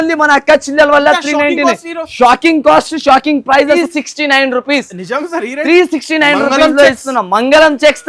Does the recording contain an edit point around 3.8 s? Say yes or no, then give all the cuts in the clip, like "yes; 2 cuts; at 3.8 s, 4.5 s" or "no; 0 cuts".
yes; 1 cut; at 3.8 s